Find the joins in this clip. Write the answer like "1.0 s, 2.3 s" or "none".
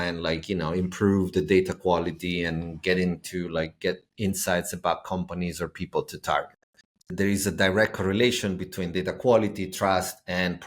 7.1 s